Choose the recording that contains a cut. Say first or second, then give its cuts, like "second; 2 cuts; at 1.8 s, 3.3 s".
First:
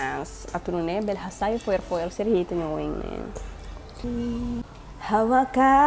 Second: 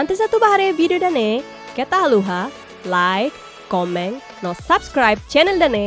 first; 1 cut; at 4.0 s